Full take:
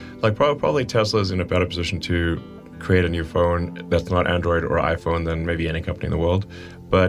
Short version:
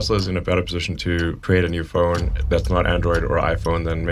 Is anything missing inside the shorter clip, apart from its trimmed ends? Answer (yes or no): yes